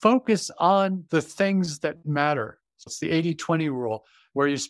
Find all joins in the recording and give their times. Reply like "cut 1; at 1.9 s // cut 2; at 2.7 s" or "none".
cut 1; at 1.0 s // cut 2; at 2.4 s